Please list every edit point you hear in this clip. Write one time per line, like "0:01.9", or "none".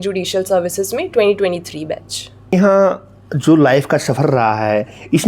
0:02.5